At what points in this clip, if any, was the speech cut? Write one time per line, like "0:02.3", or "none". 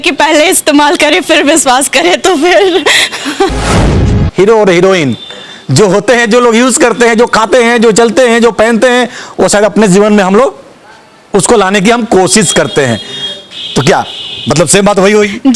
0:03.9